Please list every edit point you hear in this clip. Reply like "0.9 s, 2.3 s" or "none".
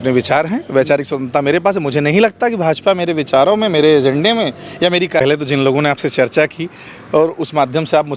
5.2 s